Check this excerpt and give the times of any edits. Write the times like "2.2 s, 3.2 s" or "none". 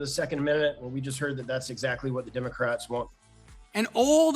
3.0 s